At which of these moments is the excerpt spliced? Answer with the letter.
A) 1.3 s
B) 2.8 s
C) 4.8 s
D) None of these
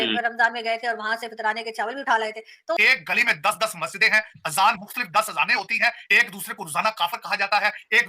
B